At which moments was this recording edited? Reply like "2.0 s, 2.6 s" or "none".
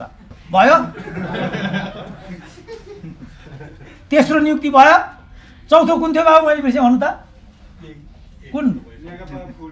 none